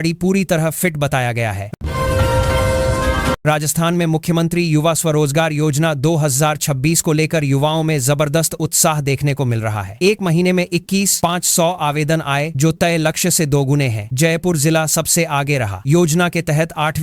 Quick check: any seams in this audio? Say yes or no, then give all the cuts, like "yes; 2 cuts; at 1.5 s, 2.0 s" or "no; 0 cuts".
yes; 3 cuts; at 1.7 s, 3.4 s, 15.9 s